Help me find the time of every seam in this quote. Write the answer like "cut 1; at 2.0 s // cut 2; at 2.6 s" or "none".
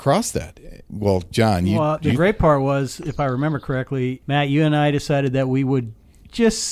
cut 1; at 0.8 s // cut 2; at 1.8 s // cut 3; at 4.2 s